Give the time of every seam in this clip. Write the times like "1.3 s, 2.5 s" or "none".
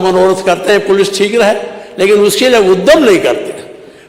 none